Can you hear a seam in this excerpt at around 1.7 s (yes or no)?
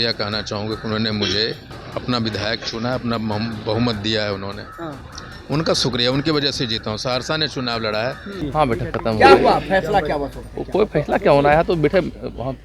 yes